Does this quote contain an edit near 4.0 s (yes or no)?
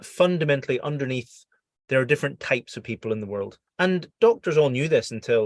yes